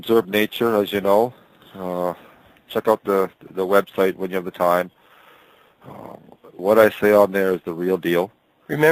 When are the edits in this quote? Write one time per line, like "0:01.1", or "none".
none